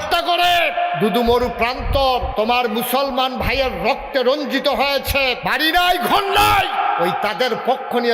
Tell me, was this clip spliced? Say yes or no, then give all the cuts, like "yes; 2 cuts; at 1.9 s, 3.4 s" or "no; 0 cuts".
yes; 3 cuts; at 2.3 s, 5.4 s, 7.1 s